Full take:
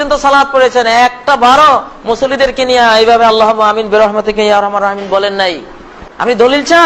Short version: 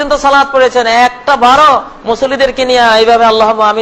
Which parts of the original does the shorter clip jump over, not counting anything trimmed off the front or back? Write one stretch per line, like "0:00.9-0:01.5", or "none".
none